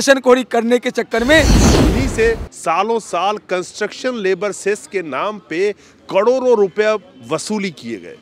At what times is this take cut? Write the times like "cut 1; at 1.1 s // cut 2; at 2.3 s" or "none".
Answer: cut 1; at 1.6 s

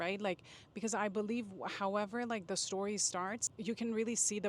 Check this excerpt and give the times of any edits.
cut 1; at 3.4 s

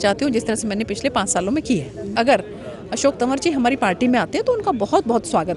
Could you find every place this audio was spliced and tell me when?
cut 1; at 2.1 s

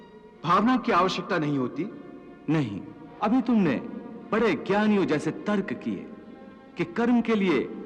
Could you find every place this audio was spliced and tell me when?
cut 1; at 3.0 s

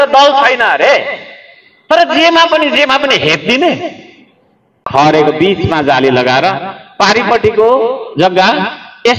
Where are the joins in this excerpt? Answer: cut 1; at 4.7 s

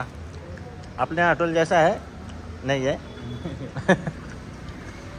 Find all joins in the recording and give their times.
none

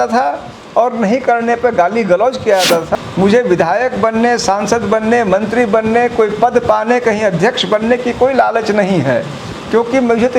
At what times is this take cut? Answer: cut 1; at 2.9 s

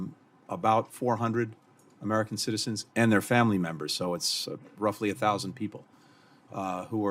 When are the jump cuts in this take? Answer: none

